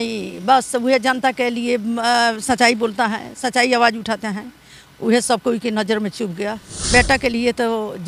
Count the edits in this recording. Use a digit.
1